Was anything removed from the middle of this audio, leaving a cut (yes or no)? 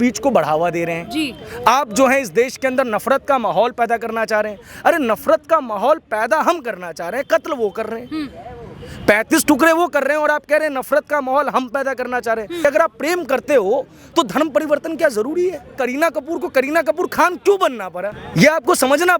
yes